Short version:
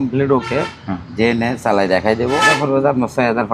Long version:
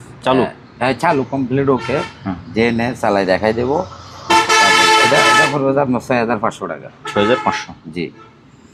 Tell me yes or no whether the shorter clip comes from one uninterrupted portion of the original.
no